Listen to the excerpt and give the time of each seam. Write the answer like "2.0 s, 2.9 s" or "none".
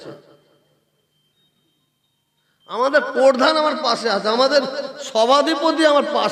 none